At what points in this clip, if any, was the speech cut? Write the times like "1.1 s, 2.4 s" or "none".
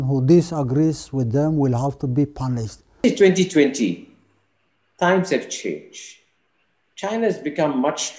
3.0 s